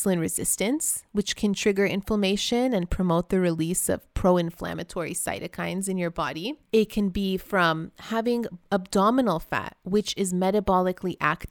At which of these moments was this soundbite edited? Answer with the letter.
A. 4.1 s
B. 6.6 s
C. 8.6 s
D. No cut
B